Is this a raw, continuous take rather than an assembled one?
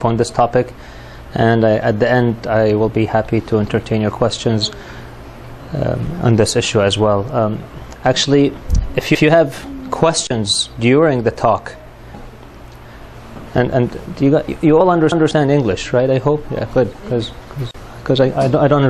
yes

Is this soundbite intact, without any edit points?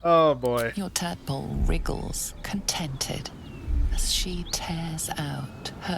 yes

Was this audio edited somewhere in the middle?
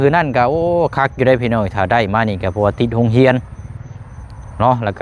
no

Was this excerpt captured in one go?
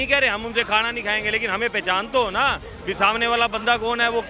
yes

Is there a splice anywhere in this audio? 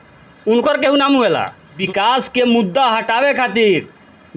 yes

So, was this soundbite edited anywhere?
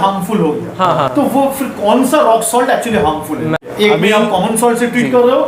yes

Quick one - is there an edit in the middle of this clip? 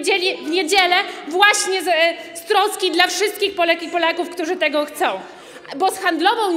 no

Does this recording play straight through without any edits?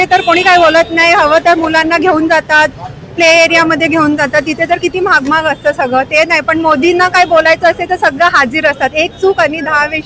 yes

